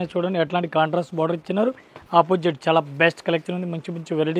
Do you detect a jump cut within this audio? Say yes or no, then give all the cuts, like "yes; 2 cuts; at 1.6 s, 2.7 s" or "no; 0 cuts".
no; 0 cuts